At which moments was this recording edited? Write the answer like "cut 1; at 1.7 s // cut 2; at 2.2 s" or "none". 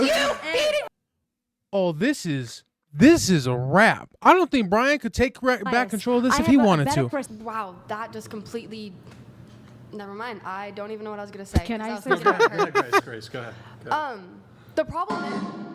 cut 1; at 0.9 s // cut 2; at 7.3 s